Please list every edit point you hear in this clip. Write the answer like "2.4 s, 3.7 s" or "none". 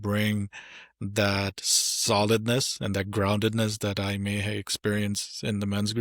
none